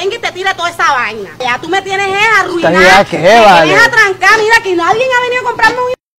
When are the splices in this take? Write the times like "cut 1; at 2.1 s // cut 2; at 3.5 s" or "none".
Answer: none